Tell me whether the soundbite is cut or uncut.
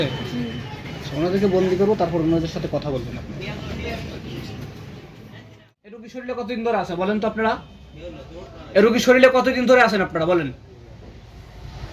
cut